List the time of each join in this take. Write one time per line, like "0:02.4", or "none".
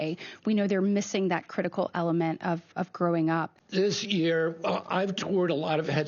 0:03.6